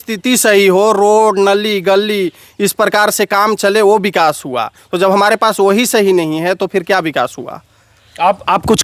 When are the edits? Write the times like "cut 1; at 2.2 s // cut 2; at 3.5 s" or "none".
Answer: none